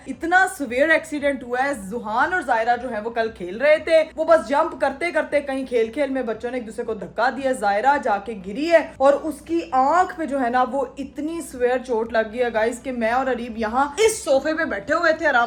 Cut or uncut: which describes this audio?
uncut